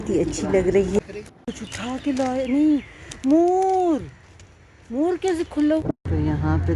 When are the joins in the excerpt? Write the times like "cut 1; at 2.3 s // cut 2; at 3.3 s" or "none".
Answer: cut 1; at 1.0 s // cut 2; at 5.8 s